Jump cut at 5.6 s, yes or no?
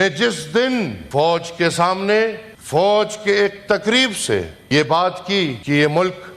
yes